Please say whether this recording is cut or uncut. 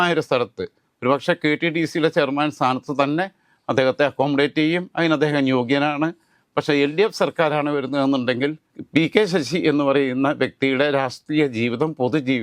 cut